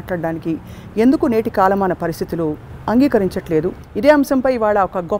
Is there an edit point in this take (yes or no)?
yes